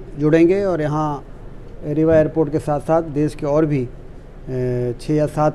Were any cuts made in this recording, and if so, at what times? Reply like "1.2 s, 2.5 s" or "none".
none